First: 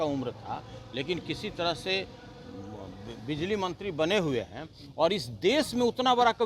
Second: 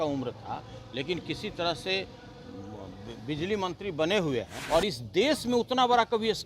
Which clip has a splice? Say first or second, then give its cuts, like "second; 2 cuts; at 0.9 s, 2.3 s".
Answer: second; 1 cut; at 4.5 s